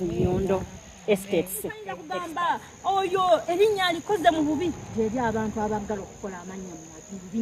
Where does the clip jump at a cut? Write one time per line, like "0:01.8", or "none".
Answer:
0:02.1